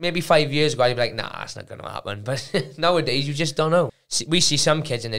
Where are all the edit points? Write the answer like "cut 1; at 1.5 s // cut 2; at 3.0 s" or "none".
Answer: cut 1; at 4.0 s